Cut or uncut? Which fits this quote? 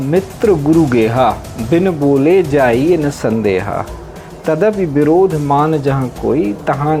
uncut